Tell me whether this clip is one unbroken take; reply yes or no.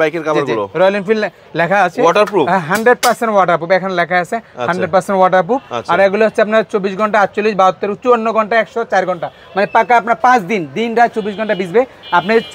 yes